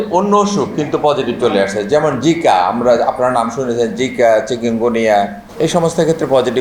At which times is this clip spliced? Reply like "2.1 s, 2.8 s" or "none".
5.4 s